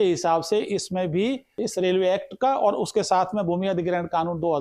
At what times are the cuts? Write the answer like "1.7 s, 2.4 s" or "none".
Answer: 1.5 s